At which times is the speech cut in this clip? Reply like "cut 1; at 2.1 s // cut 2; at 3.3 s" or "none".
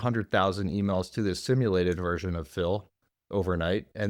none